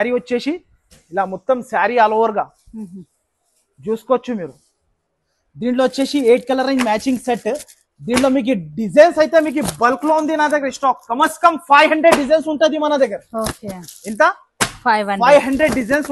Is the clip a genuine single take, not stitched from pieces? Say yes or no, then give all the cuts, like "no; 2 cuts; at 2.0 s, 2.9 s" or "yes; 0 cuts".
yes; 0 cuts